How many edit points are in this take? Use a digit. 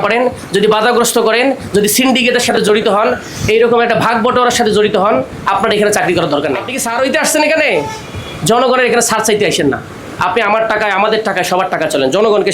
1